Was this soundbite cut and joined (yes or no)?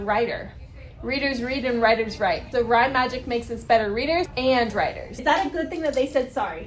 yes